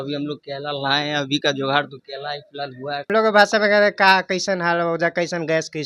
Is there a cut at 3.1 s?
yes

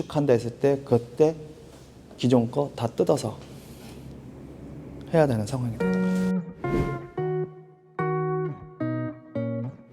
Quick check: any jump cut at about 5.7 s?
yes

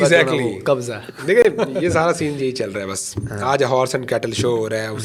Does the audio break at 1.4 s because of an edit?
no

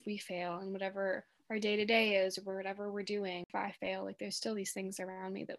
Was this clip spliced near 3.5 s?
yes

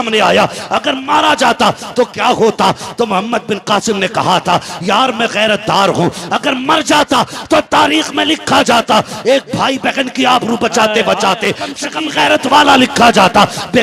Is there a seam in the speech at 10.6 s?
no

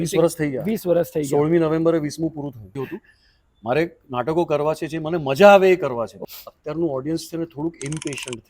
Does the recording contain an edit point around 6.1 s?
yes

